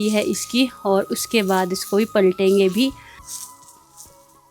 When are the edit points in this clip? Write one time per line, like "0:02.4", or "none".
none